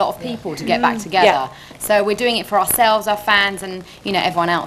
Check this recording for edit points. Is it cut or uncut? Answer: uncut